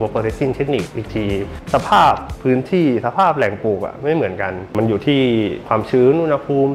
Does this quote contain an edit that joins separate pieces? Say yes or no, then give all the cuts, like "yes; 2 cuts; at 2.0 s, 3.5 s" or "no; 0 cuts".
yes; 3 cuts; at 1.6 s, 4.6 s, 5.6 s